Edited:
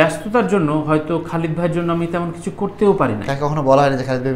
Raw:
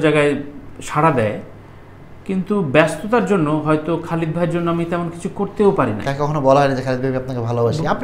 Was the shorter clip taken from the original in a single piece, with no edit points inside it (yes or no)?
yes